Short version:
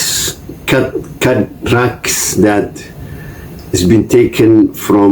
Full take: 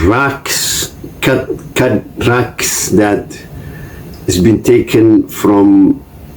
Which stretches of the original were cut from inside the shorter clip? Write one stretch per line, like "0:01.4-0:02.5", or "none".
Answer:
none